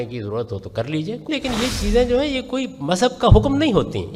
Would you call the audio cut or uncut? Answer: cut